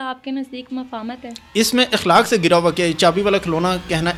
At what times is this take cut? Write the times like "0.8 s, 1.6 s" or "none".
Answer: none